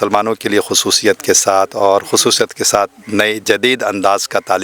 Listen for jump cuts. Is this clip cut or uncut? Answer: uncut